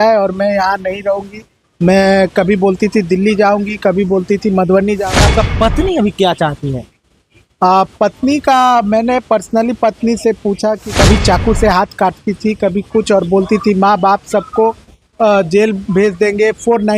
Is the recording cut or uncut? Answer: cut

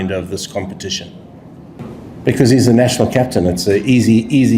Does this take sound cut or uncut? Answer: cut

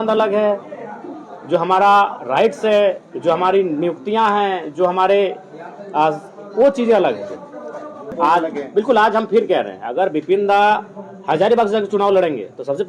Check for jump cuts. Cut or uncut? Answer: cut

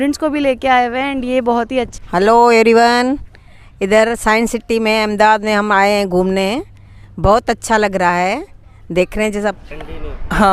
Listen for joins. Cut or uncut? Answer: cut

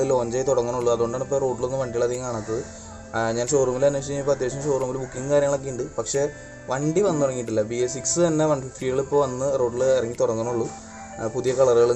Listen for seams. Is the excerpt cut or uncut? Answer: uncut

